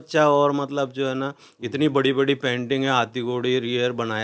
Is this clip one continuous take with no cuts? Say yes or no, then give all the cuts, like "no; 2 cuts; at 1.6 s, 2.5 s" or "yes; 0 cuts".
yes; 0 cuts